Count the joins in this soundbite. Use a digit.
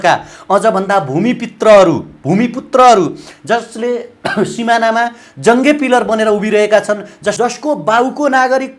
1